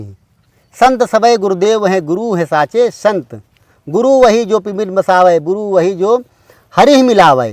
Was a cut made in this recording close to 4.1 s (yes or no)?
no